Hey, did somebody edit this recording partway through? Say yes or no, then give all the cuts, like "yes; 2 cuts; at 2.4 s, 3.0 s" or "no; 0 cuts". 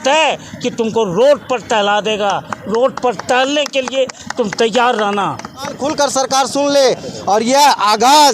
yes; 1 cut; at 5.8 s